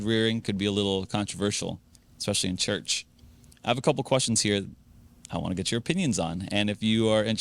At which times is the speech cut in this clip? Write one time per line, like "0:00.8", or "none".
none